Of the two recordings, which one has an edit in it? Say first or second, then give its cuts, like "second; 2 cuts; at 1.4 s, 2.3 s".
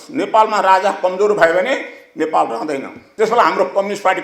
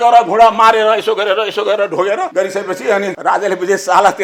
first; 1 cut; at 3.1 s